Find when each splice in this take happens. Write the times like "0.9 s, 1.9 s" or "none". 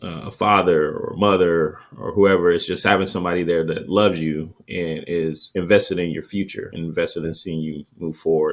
none